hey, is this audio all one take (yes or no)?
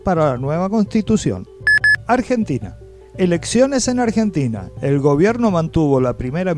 no